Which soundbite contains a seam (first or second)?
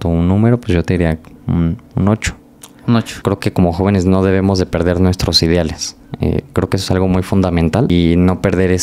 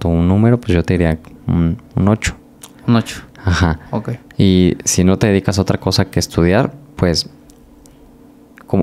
first